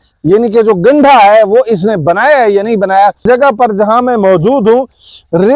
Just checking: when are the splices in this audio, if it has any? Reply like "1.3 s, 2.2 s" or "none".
3.3 s